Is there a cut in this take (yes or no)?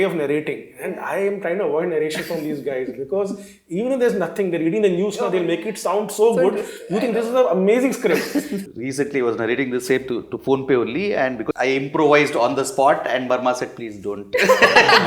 yes